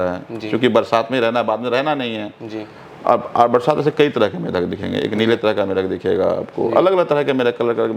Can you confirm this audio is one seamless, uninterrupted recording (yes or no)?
yes